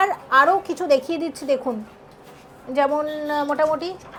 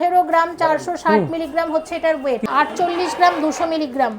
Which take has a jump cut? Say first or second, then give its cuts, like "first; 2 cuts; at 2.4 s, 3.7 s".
second; 1 cut; at 2.5 s